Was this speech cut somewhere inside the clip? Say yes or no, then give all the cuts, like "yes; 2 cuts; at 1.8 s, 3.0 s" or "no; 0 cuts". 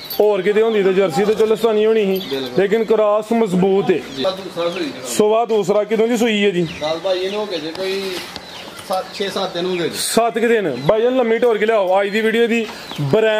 yes; 1 cut; at 4.1 s